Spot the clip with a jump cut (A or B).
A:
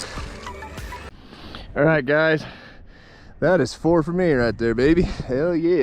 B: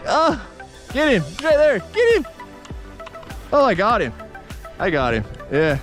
A